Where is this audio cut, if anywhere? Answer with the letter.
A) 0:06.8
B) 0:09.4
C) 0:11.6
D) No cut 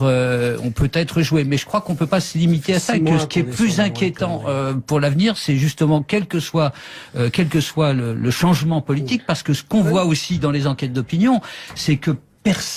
B